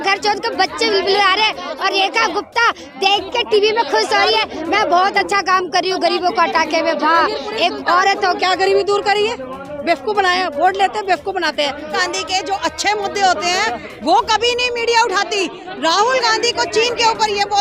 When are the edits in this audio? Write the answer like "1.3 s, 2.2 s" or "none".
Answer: 8.4 s, 12.0 s